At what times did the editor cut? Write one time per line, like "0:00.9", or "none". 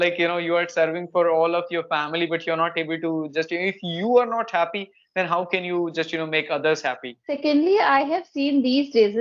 0:07.4

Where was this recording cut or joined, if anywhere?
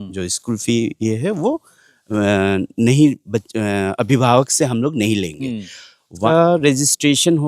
0:06.3

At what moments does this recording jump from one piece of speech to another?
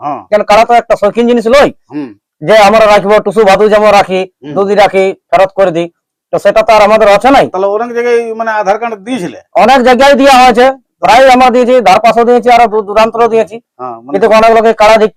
none

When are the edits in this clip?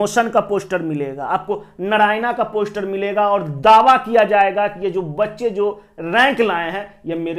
none

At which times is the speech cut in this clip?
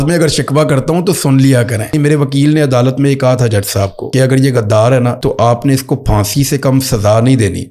0:01.9
0:04.0
0:05.2

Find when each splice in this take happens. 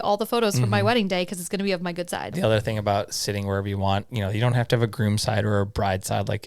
0:02.3
0:04.1

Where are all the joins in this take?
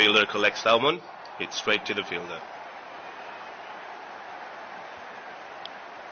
none

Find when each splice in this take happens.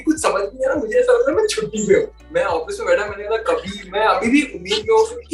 0:02.2

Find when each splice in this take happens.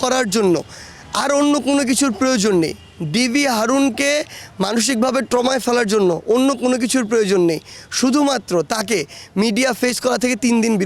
none

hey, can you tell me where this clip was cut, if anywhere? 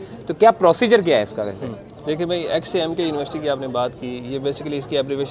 none

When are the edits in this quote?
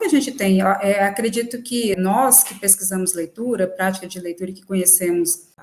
0:02.0

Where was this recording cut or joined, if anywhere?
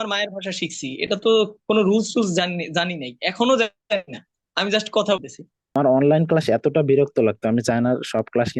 0:05.7

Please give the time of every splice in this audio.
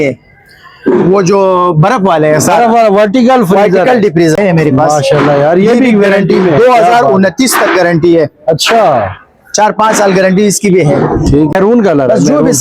0:04.4
0:11.5

